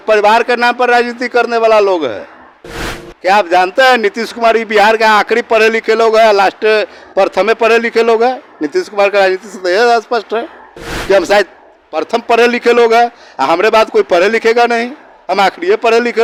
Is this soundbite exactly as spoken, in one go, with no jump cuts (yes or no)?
yes